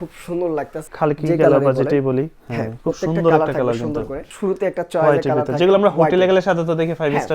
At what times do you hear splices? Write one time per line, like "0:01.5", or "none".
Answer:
0:00.8
0:04.3